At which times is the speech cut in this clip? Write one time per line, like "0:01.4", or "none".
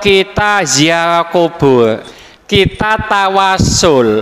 0:02.1